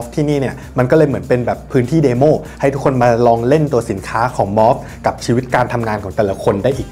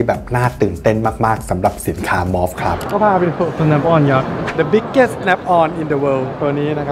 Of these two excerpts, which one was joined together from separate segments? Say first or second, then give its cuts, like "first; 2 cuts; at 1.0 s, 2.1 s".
second; 1 cut; at 2.9 s